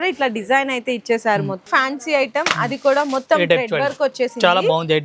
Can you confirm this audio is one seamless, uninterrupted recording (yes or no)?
no